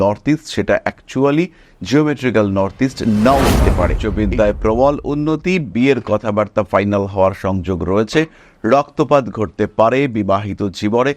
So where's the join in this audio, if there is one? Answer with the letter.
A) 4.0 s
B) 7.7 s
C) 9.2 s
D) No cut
A